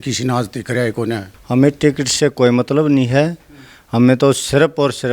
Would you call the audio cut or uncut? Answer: cut